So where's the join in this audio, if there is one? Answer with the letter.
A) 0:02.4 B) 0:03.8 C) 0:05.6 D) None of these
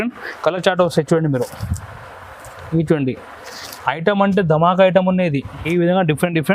C